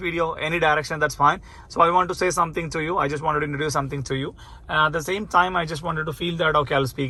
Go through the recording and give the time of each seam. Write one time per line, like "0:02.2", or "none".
none